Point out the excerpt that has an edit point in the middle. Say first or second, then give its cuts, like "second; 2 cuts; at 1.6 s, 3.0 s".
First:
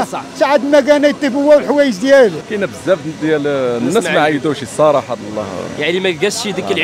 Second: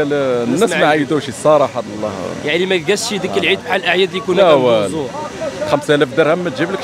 first; 1 cut; at 2.4 s